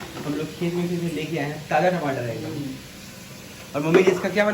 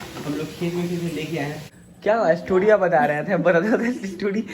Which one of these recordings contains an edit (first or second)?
second